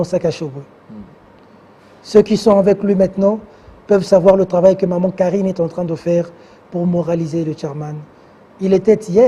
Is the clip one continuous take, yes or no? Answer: yes